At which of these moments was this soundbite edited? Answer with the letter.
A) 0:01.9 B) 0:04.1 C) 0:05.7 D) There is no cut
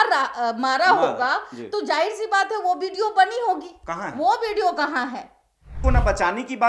C